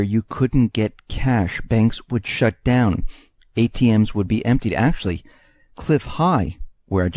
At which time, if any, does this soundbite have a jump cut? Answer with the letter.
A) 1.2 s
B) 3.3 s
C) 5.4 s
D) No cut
B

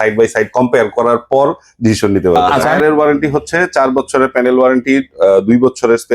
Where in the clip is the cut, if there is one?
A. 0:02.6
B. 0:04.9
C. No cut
A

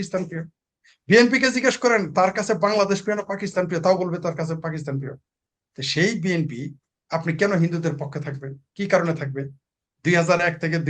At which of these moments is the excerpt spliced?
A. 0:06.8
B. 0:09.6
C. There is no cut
C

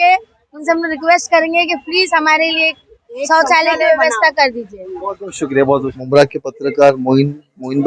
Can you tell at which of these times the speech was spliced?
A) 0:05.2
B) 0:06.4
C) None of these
C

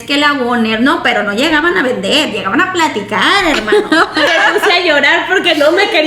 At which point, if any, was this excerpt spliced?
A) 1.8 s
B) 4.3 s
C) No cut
B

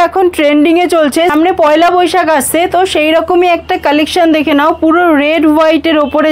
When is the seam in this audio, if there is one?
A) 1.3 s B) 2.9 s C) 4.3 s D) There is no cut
A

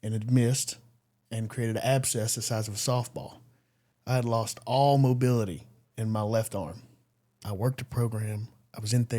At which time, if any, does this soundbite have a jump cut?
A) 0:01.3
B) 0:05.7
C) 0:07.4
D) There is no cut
C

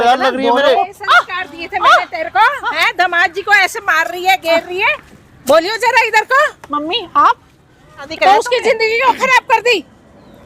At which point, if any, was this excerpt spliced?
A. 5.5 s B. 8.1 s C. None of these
B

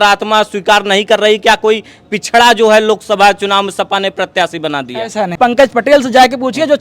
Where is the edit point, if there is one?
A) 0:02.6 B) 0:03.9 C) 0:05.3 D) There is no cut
C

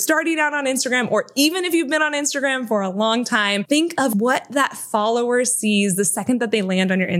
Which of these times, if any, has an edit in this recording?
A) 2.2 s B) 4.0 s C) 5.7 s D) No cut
B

